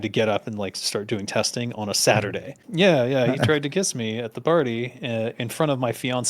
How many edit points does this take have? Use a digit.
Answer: 1